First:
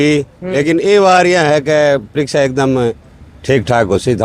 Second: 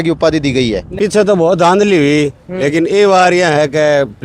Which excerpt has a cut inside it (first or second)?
second